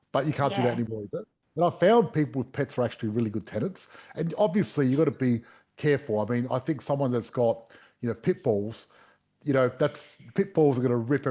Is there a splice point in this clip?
yes; 1 cut; at 1.4 s

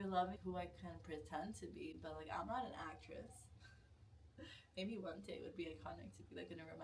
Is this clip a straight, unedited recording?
yes; 0 cuts

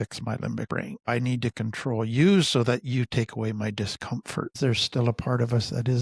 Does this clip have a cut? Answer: yes; 2 cuts; at 1.1 s, 4.5 s

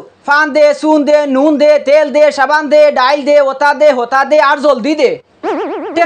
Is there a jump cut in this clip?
no; 0 cuts

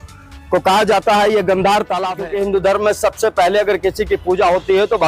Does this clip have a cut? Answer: yes; 1 cut; at 2.2 s

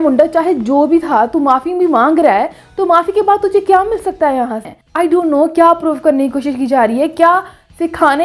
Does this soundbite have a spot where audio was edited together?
yes; 1 cut; at 4.7 s

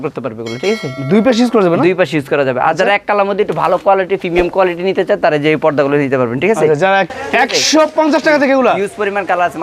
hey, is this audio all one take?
no; 1 cut; at 7.1 s

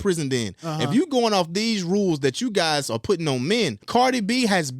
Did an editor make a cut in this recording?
yes; 1 cut; at 3.8 s

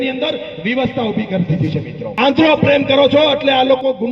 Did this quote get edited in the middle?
yes; 1 cut; at 2.0 s

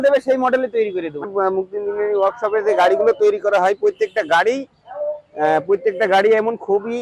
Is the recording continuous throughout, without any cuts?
no; 1 cut; at 1.3 s

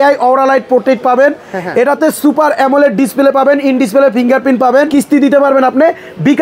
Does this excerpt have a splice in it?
yes; 1 cut; at 4.9 s

